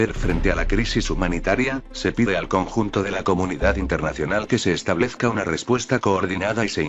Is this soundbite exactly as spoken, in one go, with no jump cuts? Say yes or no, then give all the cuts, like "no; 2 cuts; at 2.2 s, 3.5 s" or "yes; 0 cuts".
yes; 0 cuts